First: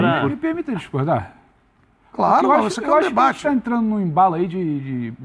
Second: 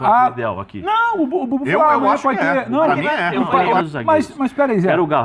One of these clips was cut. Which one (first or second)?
second